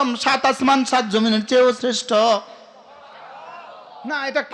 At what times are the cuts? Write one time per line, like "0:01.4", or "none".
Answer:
none